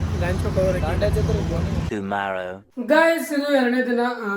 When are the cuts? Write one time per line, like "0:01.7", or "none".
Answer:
none